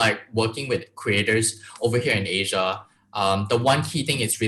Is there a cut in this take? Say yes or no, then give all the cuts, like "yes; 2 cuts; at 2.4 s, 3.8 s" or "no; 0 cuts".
no; 0 cuts